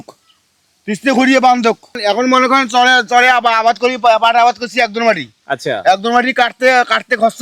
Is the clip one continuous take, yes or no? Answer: yes